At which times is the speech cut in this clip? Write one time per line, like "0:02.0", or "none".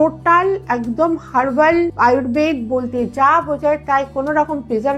0:01.9